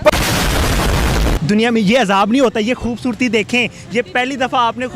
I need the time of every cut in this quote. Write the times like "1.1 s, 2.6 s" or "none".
none